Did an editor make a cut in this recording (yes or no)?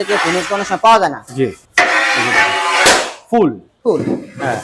yes